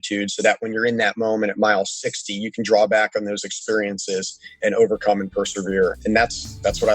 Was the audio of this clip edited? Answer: yes; 2 cuts; at 4.6 s, 6.0 s

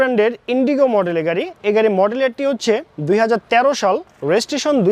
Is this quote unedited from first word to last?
yes; 0 cuts

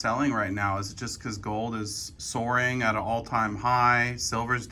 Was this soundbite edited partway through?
no; 0 cuts

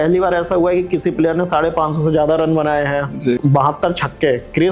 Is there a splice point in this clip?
yes; 1 cut; at 3.4 s

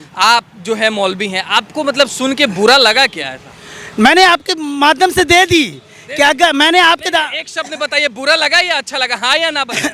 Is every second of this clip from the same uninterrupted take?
yes; 0 cuts

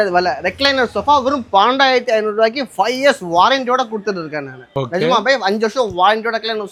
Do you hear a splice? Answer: no; 0 cuts

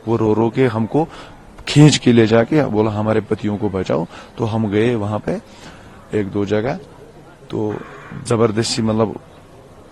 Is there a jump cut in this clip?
no; 0 cuts

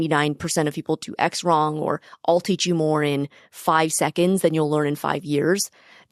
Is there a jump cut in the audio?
no; 0 cuts

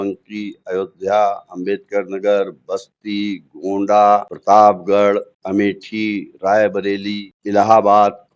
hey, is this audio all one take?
no; 3 cuts; at 4.3 s, 5.4 s, 7.3 s

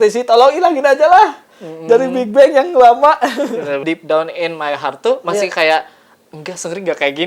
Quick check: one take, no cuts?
no; 1 cut; at 3.8 s

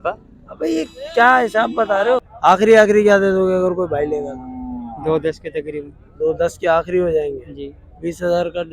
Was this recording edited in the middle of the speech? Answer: yes; 1 cut; at 2.3 s

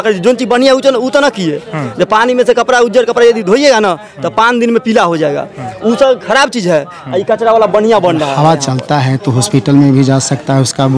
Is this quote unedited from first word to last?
no; 1 cut; at 8.3 s

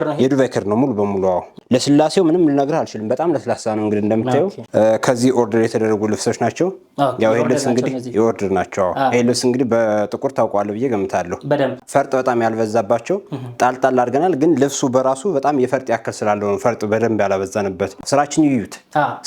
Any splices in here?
yes; 4 cuts; at 1.5 s, 4.6 s, 11.8 s, 18.0 s

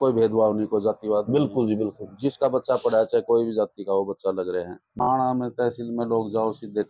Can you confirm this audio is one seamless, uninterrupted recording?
no; 1 cut; at 5.0 s

